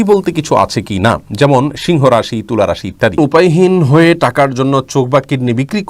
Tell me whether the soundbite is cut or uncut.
cut